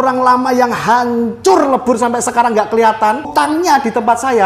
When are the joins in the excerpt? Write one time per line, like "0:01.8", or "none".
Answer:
0:03.3